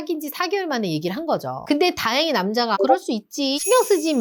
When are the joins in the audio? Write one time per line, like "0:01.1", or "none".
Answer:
none